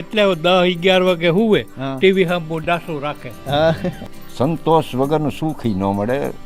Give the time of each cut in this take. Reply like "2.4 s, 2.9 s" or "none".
4.0 s